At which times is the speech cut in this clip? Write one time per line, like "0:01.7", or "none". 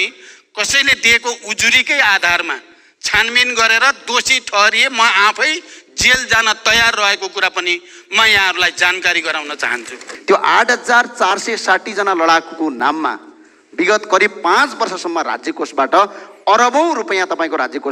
0:10.1

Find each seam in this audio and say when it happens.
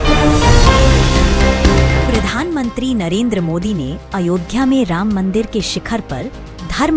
0:02.0

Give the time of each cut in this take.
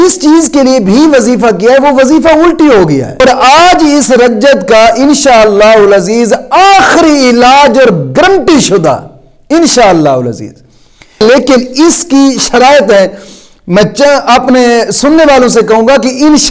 0:03.2
0:11.2

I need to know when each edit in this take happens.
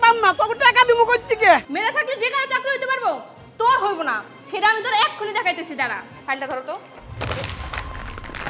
0:01.7

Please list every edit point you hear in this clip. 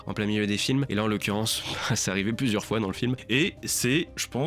0:03.2

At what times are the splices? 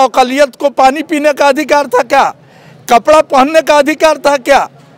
none

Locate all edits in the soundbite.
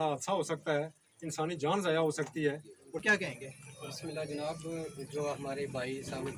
0:03.0

